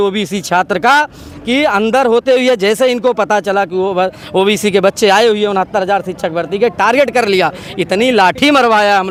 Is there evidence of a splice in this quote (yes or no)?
no